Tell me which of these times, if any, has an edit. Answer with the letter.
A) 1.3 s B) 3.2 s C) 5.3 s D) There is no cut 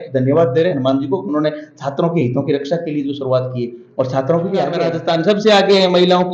C